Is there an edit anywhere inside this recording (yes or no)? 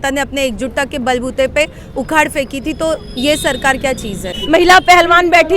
yes